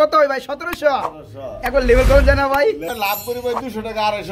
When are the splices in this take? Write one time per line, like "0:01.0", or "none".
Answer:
0:03.2